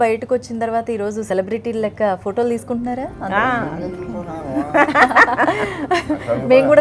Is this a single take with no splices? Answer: no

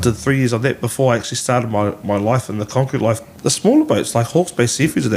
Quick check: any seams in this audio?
yes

